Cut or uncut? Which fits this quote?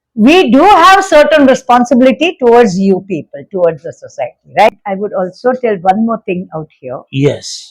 cut